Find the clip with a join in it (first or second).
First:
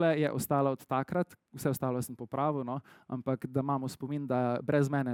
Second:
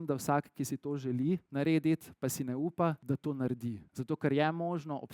second